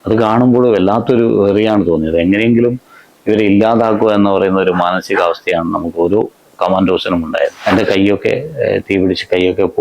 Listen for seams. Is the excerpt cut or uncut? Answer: cut